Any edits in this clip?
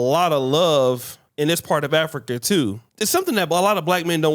yes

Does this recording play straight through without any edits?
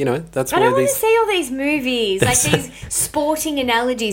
yes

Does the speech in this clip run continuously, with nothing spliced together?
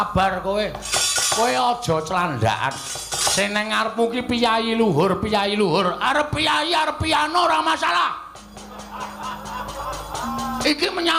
yes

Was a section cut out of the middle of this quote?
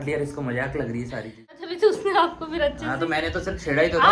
yes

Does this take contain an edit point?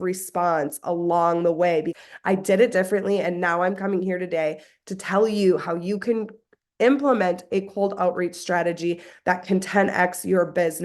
yes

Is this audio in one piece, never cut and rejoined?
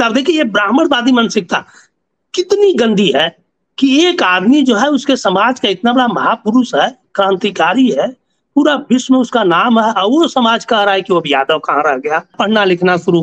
no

